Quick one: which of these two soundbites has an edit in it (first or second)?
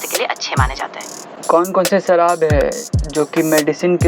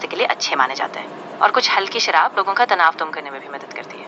first